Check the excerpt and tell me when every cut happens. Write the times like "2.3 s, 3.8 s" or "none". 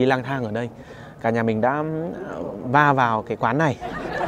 2.6 s